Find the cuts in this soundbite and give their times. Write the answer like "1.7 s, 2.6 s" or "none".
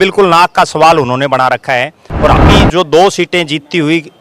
2.4 s